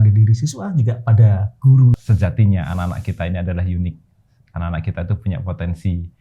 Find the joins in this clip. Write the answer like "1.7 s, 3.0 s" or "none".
1.9 s